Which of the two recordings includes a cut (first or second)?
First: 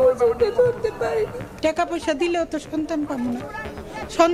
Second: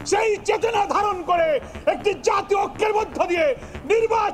first